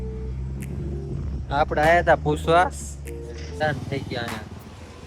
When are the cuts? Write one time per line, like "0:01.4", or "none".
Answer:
0:03.6